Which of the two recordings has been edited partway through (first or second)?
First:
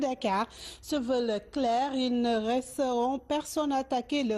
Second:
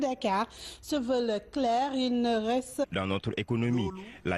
first